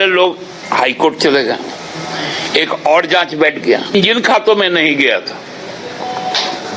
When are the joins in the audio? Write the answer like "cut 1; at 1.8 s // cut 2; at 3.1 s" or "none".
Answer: cut 1; at 3.9 s